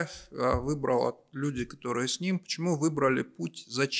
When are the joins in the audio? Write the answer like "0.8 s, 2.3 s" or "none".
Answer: none